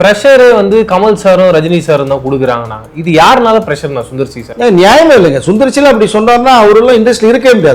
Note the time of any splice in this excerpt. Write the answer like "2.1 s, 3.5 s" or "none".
none